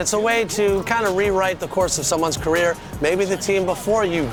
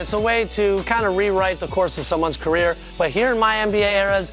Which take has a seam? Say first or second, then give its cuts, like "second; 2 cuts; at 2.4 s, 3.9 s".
second; 1 cut; at 2.9 s